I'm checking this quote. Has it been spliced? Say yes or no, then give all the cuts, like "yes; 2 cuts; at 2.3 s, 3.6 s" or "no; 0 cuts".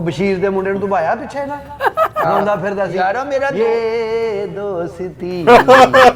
no; 0 cuts